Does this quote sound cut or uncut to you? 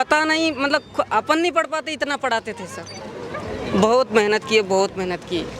uncut